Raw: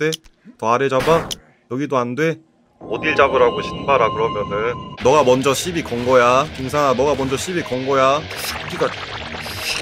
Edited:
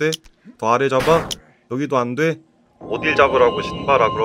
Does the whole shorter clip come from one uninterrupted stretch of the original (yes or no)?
yes